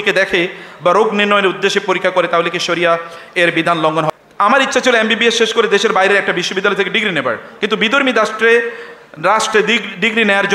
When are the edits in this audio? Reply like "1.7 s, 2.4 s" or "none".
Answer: 4.1 s